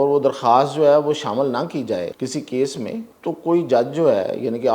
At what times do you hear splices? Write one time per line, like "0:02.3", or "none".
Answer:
0:02.1
0:03.1